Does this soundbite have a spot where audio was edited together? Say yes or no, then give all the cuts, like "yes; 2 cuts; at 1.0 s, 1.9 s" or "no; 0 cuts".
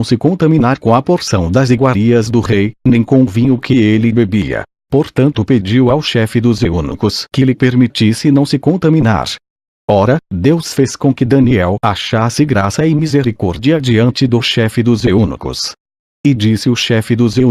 yes; 1 cut; at 5.5 s